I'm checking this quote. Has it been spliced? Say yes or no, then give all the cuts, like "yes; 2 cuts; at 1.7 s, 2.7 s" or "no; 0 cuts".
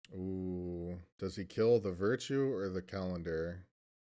yes; 1 cut; at 1.1 s